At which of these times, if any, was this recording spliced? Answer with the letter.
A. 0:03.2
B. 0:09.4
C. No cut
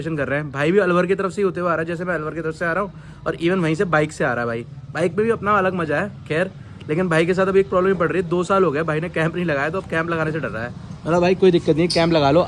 C